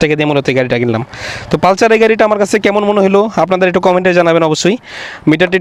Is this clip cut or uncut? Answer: uncut